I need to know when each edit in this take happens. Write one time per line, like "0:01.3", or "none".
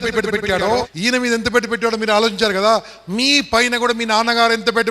0:00.9

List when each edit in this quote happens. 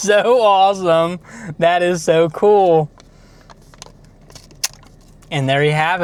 none

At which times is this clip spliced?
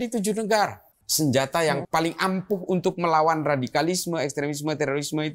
0:01.0
0:01.8

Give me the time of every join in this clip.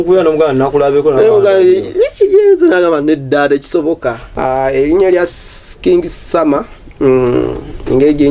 0:04.2

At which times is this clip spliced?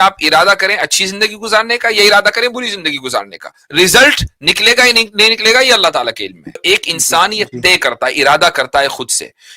0:06.6

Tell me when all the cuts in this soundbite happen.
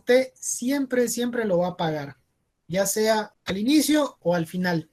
none

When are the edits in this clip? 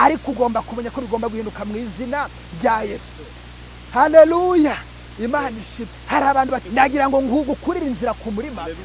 0:06.6

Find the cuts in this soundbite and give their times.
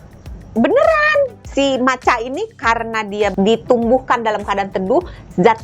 0:01.4
0:03.3

